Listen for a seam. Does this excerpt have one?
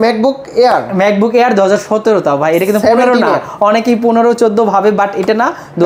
no; 0 cuts

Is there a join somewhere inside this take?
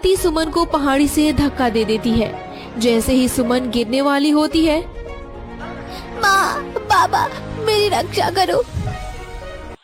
no; 0 cuts

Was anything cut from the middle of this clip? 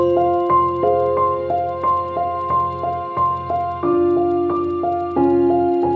no; 0 cuts

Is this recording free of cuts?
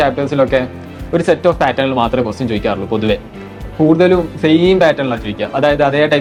yes; 0 cuts

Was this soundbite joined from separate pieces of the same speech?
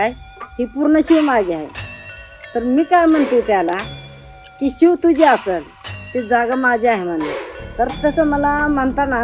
yes; 1 cut; at 7.5 s

